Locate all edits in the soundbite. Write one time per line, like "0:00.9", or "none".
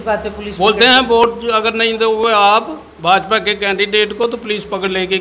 none